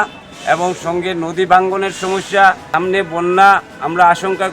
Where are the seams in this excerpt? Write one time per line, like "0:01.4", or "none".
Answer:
0:02.6

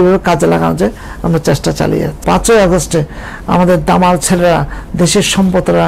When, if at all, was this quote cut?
0:02.2

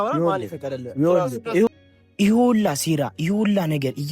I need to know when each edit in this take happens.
0:01.7

